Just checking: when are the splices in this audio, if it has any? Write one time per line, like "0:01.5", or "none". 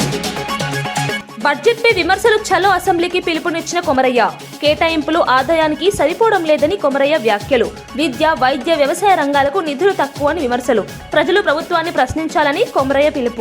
0:01.2